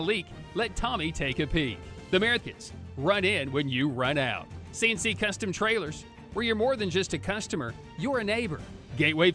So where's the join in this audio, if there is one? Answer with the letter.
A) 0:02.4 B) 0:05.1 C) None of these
A